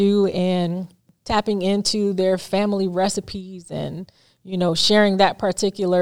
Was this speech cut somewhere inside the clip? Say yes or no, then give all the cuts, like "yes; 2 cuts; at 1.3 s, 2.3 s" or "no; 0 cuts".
yes; 1 cut; at 1.1 s